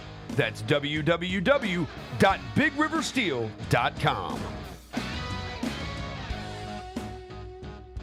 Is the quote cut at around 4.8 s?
no; 0 cuts

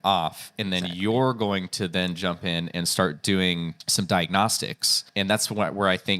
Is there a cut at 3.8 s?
yes; 2 cuts; at 3.8 s, 5.0 s

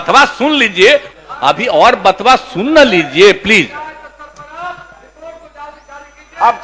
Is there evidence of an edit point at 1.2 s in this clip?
yes; 1 cut; at 1.2 s

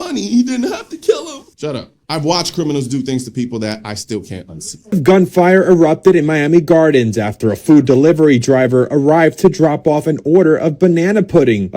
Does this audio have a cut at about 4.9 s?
yes; 1 cut; at 4.9 s

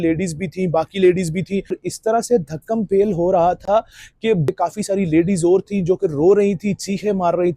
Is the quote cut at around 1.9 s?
yes; 2 cuts; at 1.9 s, 4.5 s

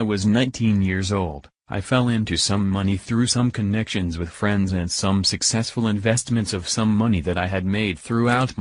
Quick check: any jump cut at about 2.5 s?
yes; 1 cut; at 2.5 s

